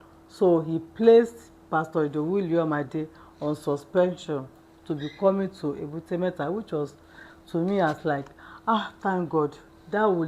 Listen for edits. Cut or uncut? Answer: uncut